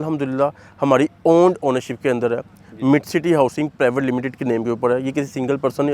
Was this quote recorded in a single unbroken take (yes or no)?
yes